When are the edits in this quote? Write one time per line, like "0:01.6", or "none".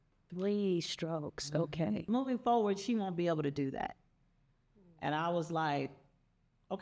0:02.0